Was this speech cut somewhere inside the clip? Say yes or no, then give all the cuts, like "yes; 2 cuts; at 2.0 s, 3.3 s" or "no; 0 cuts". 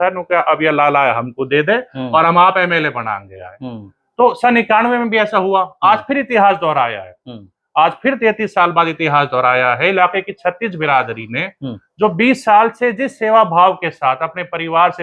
no; 0 cuts